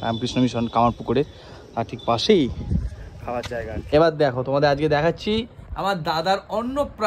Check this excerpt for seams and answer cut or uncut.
cut